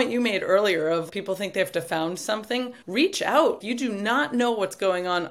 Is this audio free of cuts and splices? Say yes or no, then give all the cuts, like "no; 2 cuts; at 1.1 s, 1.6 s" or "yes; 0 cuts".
no; 3 cuts; at 1.1 s, 2.8 s, 3.6 s